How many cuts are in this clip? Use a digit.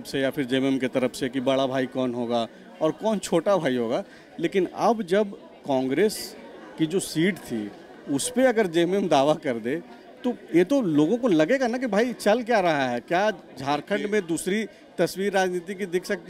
0